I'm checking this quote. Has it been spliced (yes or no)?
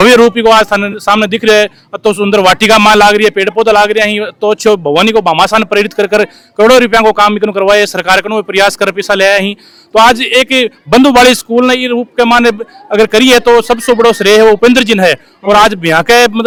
no